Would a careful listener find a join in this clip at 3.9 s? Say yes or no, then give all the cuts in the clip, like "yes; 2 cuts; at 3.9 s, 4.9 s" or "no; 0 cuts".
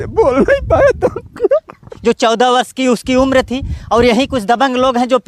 no; 1 cut; at 1.8 s